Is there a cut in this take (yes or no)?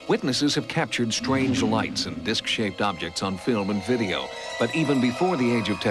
no